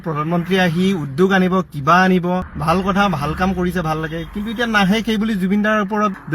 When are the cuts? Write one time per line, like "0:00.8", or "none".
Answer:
0:02.5